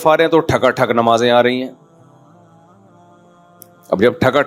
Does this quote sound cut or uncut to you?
cut